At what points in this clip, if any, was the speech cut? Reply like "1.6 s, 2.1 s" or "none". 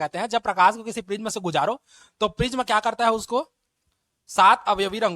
none